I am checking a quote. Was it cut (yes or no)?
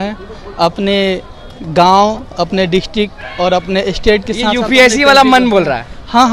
no